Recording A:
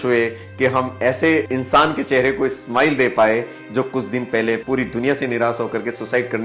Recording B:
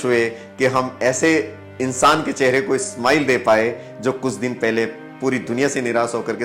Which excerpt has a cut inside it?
A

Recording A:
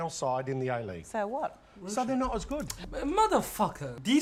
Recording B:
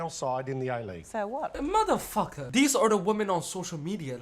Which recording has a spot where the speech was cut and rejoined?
B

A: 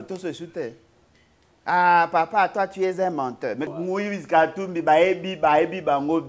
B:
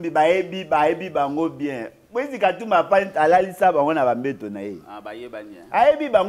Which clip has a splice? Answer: A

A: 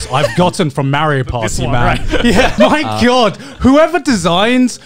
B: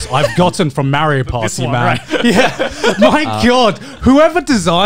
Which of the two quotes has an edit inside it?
A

